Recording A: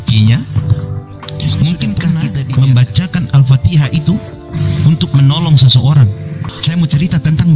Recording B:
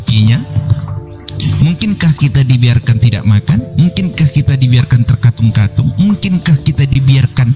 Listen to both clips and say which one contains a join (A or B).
A